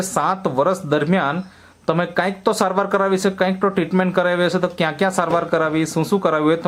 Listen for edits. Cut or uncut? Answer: uncut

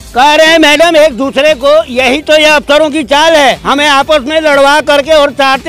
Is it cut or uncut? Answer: uncut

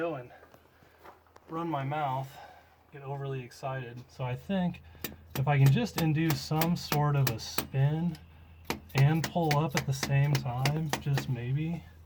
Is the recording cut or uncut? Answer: uncut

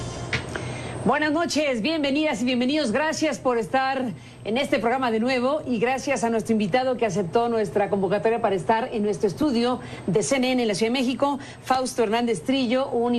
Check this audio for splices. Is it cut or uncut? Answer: uncut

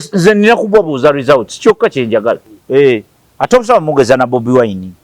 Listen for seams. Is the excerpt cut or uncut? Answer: cut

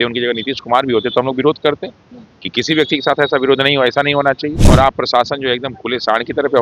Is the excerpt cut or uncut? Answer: cut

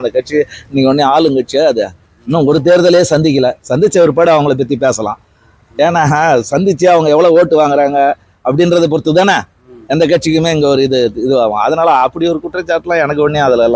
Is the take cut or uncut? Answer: uncut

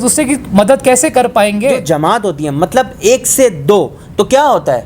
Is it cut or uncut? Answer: cut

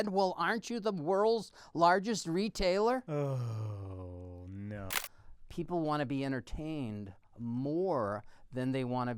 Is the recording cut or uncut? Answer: cut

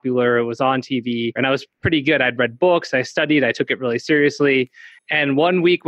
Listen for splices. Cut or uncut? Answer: cut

